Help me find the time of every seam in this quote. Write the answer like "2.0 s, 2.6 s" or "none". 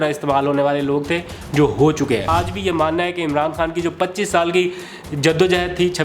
2.3 s